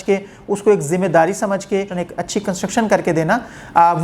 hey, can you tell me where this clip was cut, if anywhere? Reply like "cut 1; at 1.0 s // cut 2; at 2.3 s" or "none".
cut 1; at 1.9 s